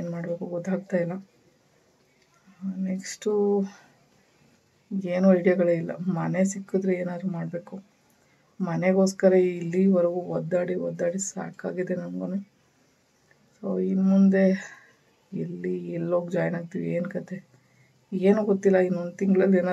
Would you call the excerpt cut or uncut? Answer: uncut